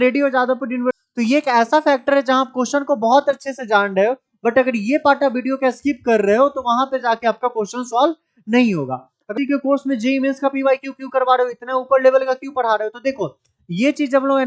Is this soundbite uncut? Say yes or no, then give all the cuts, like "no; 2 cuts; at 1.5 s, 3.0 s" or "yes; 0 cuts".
no; 2 cuts; at 1.0 s, 9.3 s